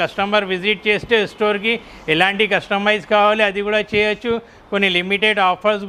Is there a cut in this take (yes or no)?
no